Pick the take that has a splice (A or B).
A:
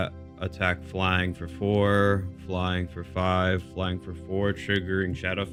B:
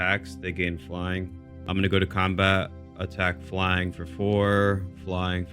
B